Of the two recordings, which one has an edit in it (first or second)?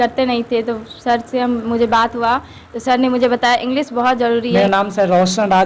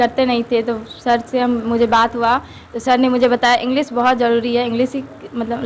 first